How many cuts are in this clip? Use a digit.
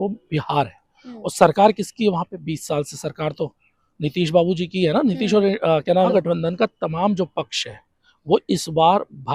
1